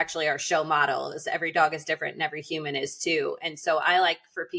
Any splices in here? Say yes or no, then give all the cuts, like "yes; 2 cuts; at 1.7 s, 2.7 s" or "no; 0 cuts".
no; 0 cuts